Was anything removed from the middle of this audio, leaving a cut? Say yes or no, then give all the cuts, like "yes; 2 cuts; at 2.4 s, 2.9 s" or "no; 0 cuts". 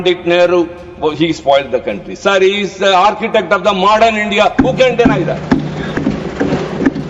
yes; 1 cut; at 6.0 s